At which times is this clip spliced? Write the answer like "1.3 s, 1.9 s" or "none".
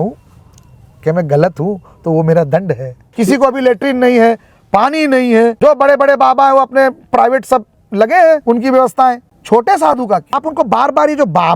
3.0 s, 5.6 s, 8.4 s, 9.3 s, 10.4 s